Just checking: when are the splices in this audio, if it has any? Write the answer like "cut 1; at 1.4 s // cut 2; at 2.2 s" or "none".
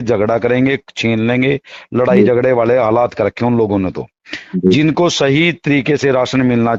none

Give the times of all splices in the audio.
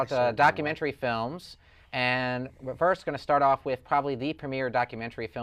cut 1; at 4.0 s

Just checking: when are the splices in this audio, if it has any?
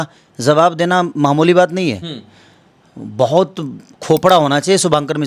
none

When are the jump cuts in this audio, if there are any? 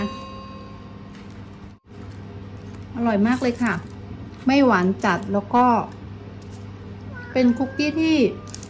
cut 1; at 1.9 s

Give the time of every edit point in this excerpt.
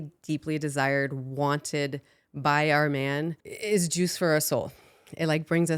cut 1; at 3.5 s

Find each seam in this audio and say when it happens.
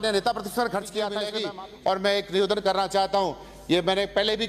cut 1; at 1.3 s

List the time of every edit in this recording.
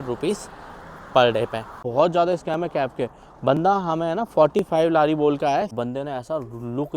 cut 1; at 1.7 s // cut 2; at 5.7 s

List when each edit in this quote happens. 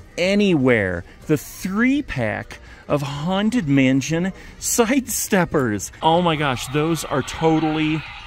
cut 1; at 5.9 s

